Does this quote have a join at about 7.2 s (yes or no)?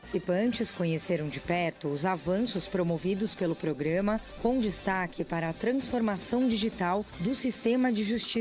no